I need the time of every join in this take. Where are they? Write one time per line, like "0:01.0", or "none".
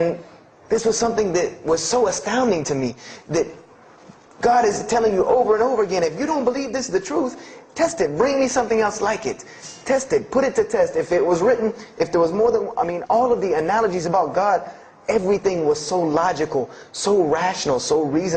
0:02.0